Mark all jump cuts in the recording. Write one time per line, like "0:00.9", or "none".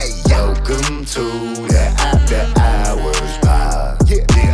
none